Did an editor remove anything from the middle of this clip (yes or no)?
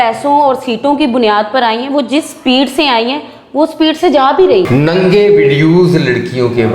yes